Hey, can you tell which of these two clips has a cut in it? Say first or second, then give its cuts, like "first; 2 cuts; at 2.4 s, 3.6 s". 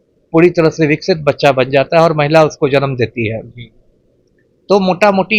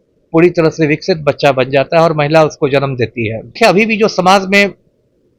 second; 1 cut; at 3.5 s